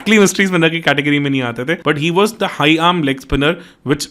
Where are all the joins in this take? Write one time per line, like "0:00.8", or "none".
0:01.8